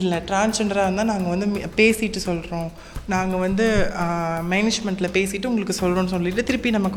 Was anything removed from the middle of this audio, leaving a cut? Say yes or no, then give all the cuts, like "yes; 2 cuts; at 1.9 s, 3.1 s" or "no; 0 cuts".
no; 0 cuts